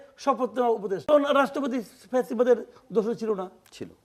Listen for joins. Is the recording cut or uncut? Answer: cut